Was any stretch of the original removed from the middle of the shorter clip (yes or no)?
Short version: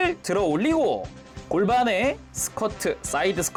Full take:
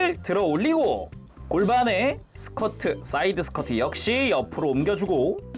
no